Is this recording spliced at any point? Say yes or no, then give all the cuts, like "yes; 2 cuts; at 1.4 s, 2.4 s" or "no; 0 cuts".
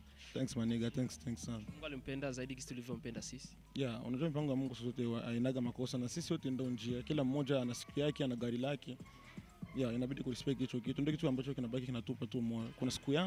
no; 0 cuts